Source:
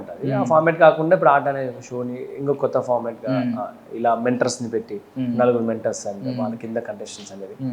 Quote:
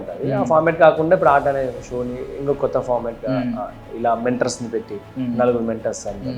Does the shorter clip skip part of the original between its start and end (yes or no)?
no